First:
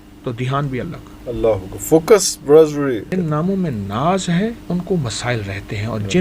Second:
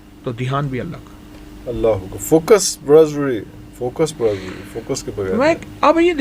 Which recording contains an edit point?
first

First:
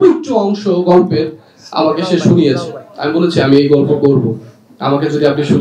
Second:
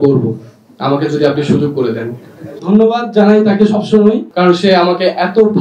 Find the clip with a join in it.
second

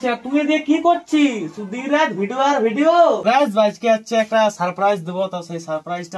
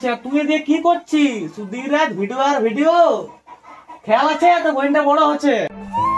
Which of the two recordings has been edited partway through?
first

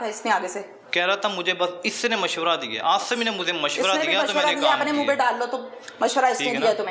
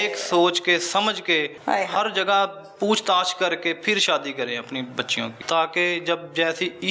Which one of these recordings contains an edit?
second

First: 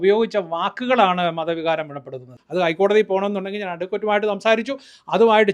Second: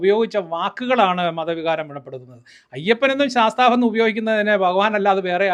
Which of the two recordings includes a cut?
first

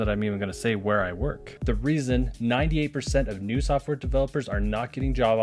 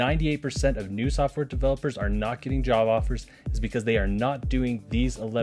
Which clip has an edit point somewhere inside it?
first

